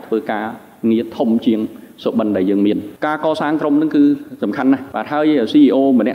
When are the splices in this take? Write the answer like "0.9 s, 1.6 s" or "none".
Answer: 2.9 s, 4.9 s